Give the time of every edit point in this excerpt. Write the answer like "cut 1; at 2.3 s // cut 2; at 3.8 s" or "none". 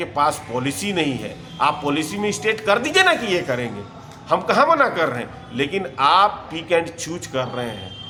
none